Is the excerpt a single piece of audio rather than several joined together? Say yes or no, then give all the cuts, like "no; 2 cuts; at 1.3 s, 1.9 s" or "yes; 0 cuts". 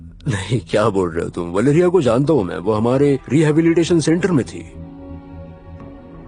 yes; 0 cuts